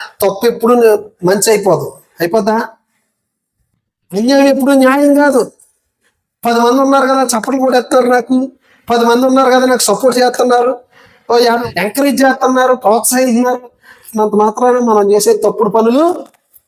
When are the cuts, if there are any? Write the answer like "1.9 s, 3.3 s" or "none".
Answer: 11.6 s